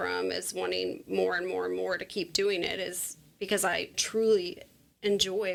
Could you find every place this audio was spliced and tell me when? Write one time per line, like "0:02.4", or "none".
none